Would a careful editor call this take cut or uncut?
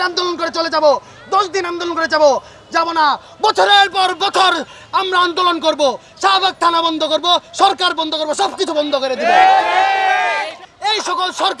cut